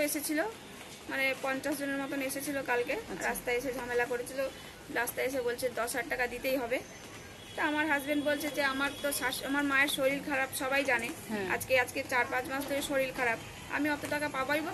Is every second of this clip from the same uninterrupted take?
yes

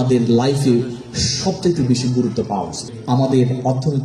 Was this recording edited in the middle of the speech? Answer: yes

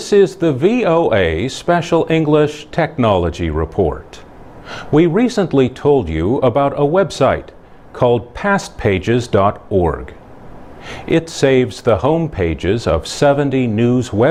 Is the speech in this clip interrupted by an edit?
no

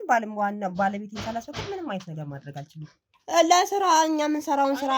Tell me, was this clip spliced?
yes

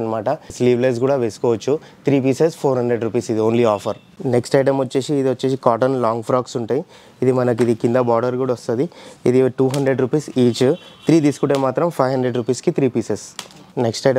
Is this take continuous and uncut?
yes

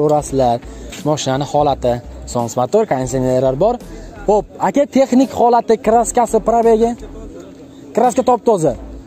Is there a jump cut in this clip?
no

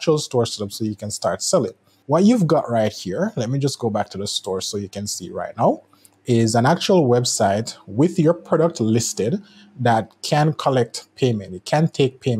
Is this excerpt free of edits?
no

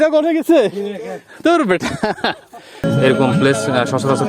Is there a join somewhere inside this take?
yes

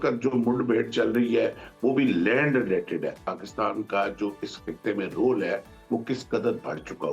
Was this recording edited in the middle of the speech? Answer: yes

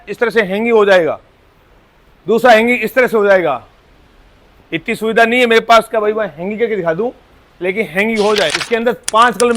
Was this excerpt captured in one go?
no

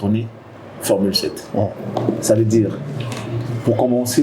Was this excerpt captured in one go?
yes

